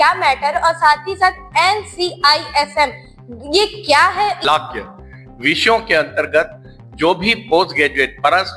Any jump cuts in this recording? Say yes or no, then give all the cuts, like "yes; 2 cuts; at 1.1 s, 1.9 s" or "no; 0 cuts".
yes; 1 cut; at 4.4 s